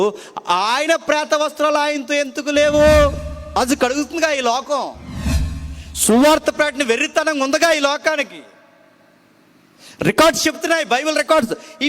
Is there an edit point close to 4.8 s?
no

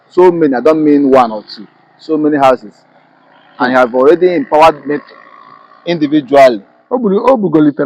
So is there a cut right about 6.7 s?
yes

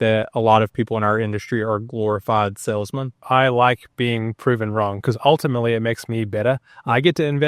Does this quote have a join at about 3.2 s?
yes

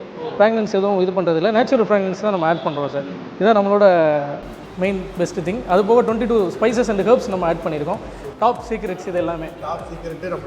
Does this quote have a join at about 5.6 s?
no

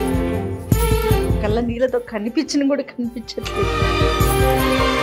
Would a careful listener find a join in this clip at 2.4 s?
no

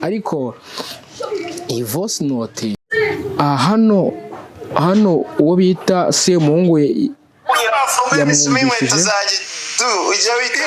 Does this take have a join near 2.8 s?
yes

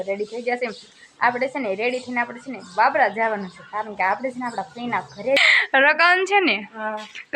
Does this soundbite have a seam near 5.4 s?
yes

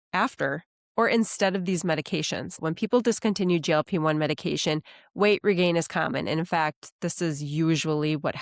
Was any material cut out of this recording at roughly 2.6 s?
yes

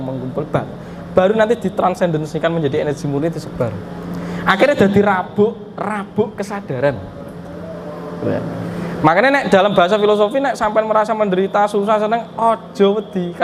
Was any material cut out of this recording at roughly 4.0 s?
no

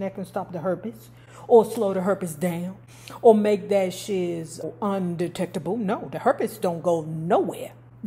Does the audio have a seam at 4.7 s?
yes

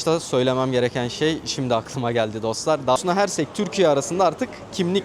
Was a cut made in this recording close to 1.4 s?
no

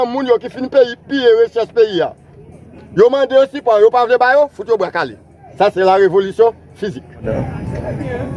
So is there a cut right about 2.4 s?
no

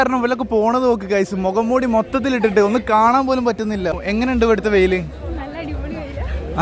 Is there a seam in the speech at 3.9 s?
yes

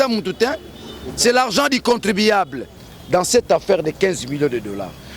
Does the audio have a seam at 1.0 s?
no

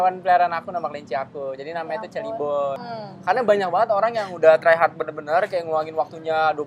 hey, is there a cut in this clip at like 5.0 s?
no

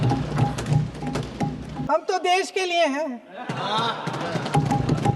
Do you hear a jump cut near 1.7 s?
yes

